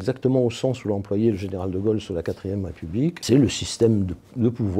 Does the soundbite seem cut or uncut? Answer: cut